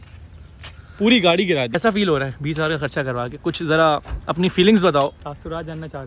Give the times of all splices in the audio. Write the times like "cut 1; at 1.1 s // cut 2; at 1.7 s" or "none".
cut 1; at 1.7 s